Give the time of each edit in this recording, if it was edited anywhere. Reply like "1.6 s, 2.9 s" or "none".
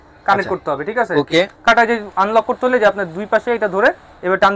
1.6 s